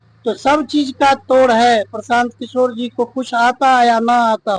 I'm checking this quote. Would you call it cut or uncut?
uncut